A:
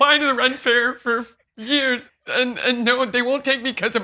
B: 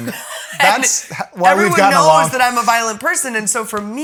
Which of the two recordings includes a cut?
A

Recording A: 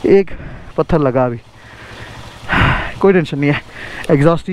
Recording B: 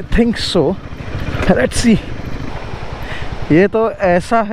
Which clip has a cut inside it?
B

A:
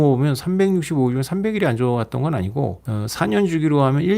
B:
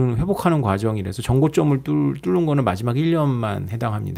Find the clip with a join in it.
A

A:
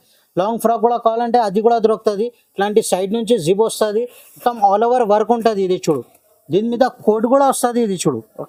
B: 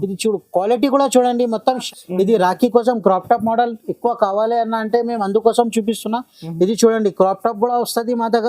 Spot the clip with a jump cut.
B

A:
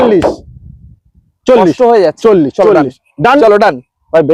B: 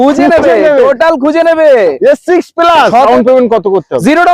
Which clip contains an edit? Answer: B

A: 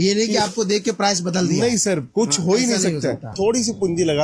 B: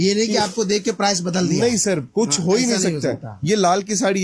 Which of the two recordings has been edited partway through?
A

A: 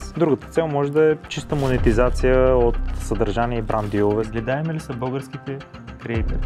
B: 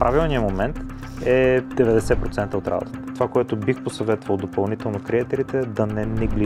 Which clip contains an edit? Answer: A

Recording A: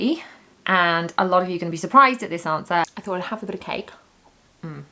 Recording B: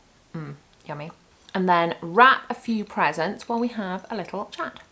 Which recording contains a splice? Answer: A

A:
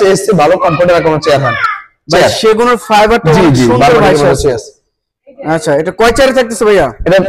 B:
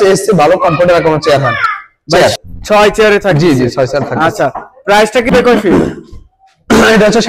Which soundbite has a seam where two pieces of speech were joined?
B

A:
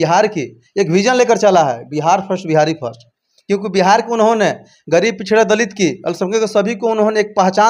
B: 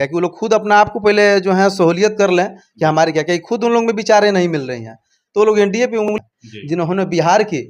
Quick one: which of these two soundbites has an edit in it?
B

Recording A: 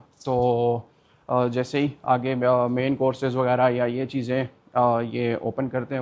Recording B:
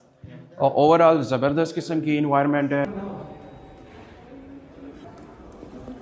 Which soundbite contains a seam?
B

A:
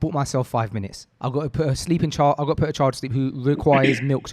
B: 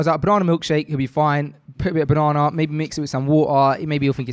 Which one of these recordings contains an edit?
A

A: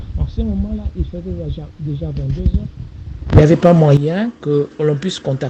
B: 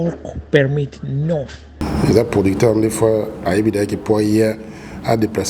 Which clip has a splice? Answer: B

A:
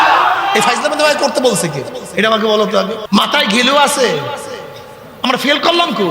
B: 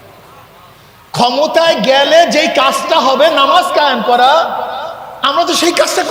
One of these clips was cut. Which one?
A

